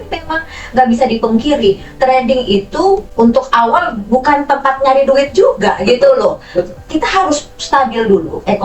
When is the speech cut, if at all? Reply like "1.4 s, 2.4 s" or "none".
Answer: none